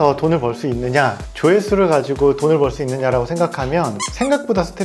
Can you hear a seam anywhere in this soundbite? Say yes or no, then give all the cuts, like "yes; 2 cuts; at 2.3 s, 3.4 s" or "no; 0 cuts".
no; 0 cuts